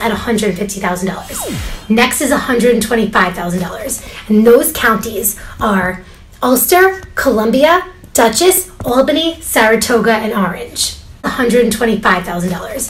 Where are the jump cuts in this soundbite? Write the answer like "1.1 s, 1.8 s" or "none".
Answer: 11.3 s